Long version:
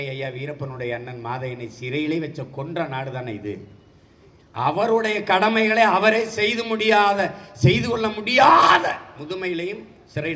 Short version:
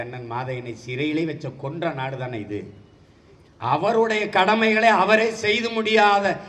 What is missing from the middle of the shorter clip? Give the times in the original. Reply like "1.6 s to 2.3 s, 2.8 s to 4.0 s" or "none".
none